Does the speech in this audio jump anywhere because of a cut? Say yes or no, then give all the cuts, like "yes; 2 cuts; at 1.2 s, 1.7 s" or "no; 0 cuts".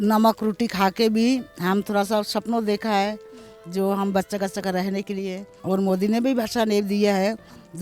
yes; 1 cut; at 5.5 s